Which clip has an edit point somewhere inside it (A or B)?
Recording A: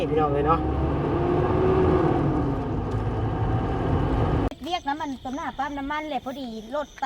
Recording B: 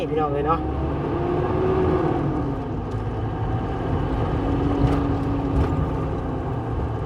A